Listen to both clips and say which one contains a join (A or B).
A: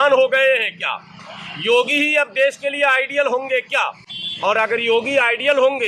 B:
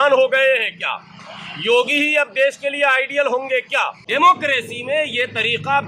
B